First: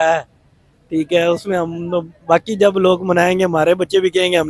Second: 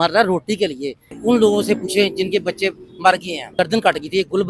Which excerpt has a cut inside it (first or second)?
second